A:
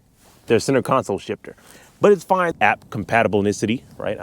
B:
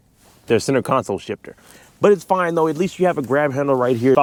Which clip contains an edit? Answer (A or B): A